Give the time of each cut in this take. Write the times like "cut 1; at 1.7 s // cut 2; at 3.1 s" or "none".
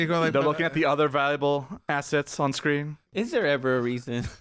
cut 1; at 3.1 s